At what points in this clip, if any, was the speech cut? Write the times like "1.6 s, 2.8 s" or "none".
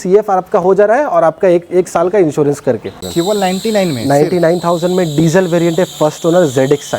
3.0 s